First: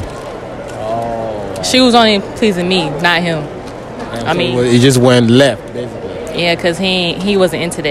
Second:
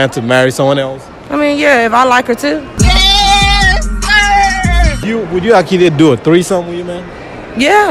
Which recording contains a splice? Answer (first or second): second